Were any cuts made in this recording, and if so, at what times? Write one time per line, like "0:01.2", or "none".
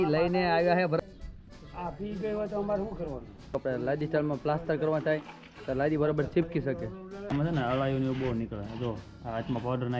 0:01.0
0:03.6
0:07.3